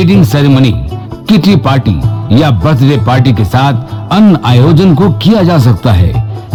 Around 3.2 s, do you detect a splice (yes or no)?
no